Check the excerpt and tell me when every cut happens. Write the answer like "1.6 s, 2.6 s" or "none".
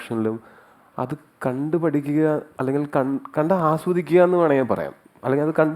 none